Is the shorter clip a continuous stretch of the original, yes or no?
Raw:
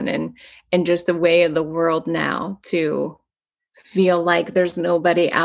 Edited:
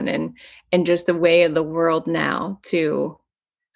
yes